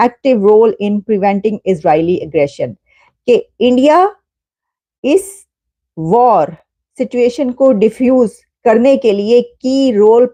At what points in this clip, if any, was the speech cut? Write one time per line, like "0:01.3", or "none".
none